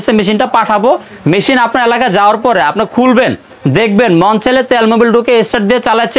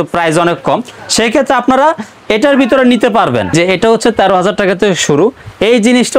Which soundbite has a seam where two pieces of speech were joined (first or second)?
second